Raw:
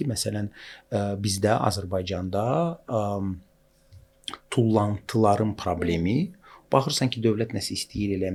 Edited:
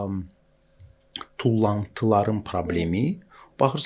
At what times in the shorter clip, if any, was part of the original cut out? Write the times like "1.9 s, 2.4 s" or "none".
none